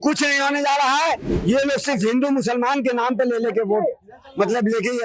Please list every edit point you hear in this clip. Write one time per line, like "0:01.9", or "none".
none